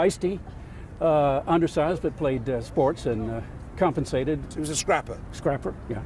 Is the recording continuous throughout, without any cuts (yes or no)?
no